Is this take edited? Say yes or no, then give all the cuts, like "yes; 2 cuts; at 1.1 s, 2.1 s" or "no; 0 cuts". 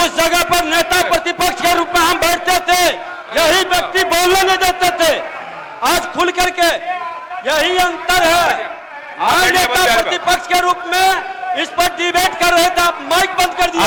no; 0 cuts